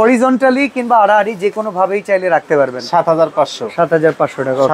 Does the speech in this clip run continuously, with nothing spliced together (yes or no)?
yes